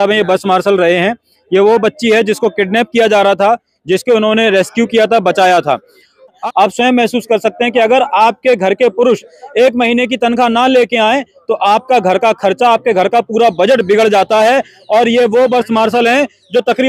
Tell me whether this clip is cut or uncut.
cut